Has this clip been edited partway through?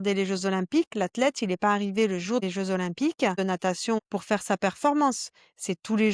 yes; 2 cuts; at 2.4 s, 3.8 s

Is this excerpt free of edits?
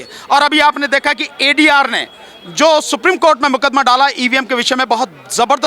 yes; 0 cuts

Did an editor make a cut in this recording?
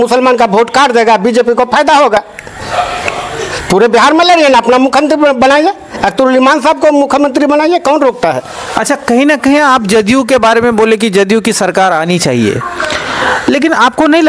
no; 0 cuts

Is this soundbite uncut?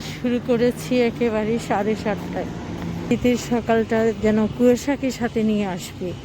no; 1 cut; at 3.1 s

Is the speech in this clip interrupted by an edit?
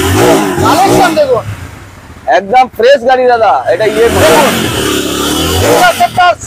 no; 0 cuts

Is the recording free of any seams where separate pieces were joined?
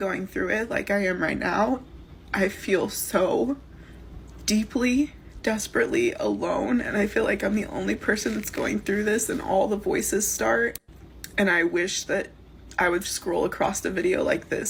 yes; 0 cuts

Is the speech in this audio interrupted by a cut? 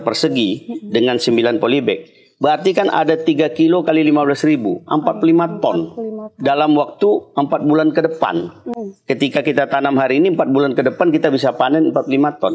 no; 0 cuts

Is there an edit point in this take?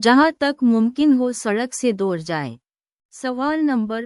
no; 0 cuts

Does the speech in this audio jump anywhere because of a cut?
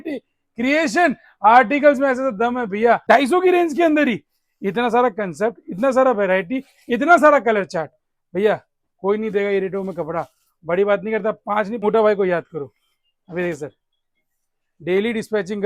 yes; 2 cuts; at 3.0 s, 11.8 s

